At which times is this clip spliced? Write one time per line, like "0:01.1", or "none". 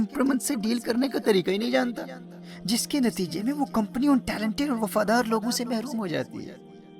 none